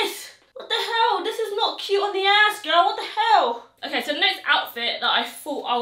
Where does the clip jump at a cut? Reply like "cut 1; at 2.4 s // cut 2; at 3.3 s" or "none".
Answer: none